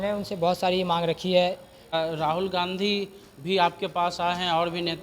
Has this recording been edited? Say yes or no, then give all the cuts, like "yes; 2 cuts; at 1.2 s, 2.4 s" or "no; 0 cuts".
yes; 1 cut; at 1.9 s